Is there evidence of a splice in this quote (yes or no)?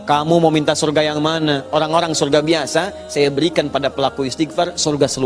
no